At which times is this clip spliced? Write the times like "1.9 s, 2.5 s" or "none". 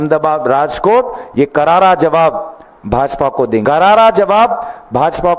3.6 s